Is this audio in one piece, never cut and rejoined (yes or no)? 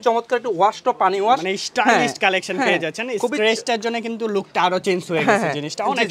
yes